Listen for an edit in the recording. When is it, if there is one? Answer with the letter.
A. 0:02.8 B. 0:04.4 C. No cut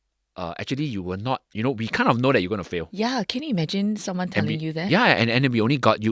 A